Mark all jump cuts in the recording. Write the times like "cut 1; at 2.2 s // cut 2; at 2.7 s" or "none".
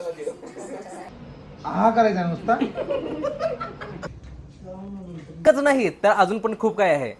cut 1; at 1.1 s // cut 2; at 5.4 s

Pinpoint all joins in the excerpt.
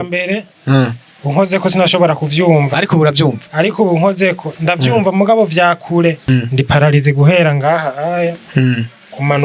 cut 1; at 6.3 s

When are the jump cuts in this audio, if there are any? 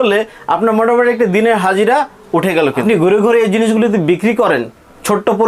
cut 1; at 2.8 s

